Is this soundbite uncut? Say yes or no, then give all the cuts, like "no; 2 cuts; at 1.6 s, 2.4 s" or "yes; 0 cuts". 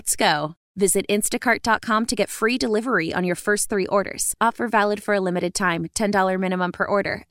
yes; 0 cuts